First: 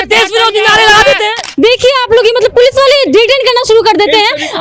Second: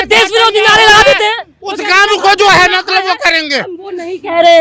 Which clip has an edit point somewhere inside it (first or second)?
first